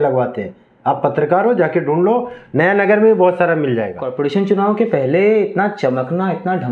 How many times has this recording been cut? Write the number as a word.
one